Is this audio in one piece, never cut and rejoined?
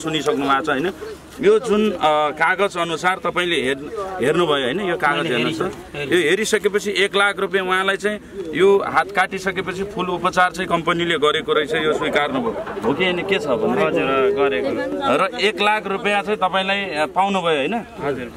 yes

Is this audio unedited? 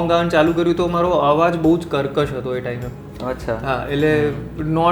yes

